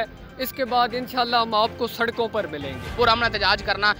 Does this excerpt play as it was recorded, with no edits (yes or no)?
no